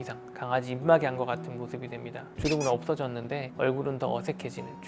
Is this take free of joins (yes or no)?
yes